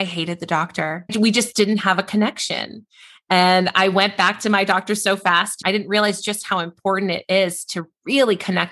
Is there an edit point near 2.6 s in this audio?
no; 2 cuts; at 1.1 s, 5.6 s

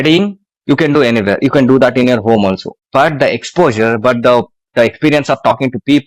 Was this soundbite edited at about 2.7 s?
yes; 1 cut; at 2.7 s

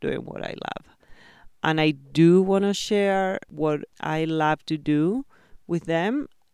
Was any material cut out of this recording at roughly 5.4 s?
no; 1 cut; at 3.9 s

